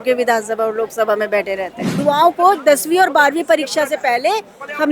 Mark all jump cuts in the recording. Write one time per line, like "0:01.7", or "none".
0:01.8